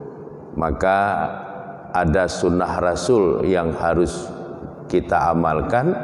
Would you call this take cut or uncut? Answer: uncut